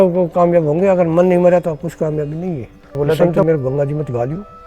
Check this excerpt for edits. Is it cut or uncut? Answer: cut